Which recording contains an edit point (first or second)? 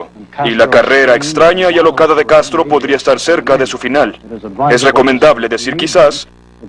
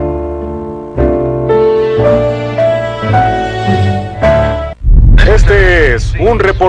first